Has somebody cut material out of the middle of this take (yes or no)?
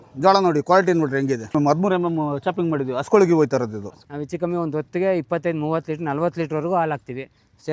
yes